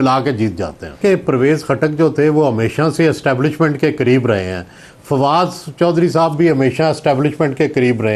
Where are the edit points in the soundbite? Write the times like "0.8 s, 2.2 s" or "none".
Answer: 1.0 s